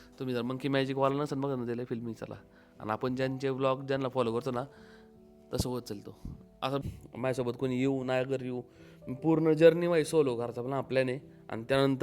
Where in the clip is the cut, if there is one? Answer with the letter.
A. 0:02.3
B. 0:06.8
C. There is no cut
B